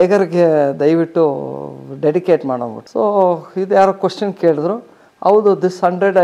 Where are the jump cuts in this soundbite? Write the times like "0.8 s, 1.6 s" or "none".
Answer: none

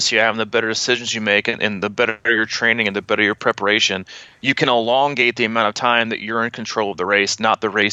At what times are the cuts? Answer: none

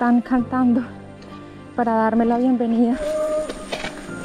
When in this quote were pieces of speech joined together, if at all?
3.0 s

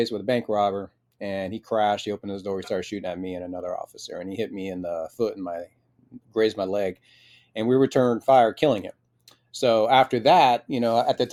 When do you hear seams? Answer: none

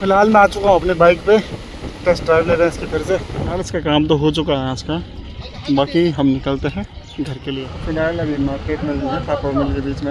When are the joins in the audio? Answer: none

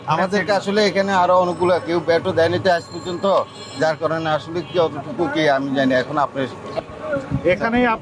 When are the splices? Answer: 6.8 s

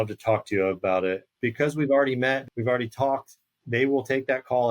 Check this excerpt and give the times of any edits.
1.3 s, 2.5 s

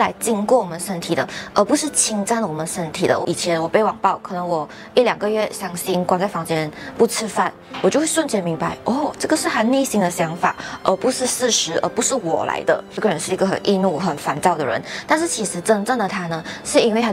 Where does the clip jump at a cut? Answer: 3.2 s, 7.6 s, 12.9 s

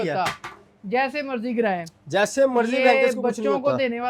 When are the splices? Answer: none

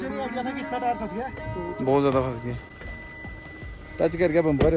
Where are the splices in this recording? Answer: none

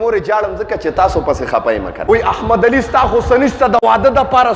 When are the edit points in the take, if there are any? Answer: 2.0 s

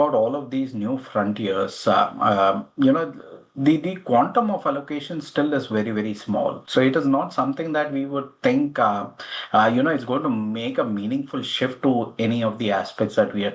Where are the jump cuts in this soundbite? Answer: none

